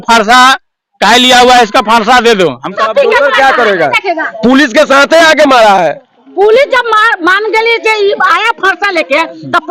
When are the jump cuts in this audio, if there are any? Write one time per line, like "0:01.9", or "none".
0:02.7